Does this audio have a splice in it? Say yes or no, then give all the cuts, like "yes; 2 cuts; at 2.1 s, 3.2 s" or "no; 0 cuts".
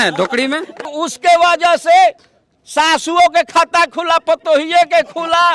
yes; 1 cut; at 1.0 s